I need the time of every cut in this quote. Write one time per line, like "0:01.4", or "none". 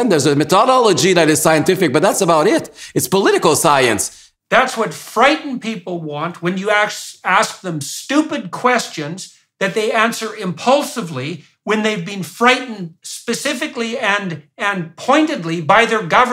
0:13.5